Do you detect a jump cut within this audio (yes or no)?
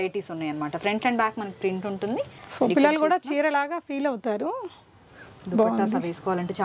yes